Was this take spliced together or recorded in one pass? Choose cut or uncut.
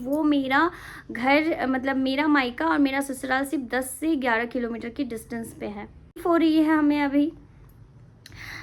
cut